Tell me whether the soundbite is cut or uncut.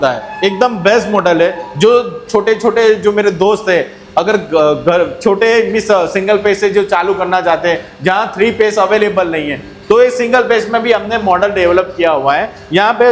uncut